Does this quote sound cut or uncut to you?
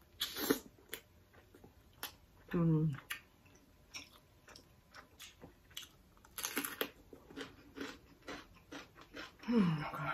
cut